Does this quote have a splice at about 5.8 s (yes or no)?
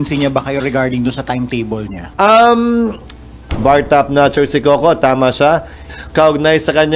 yes